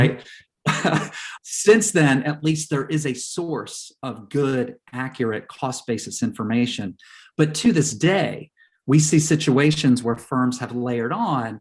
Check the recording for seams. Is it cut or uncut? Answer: cut